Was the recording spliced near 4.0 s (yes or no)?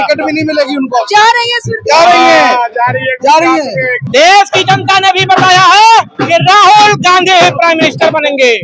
yes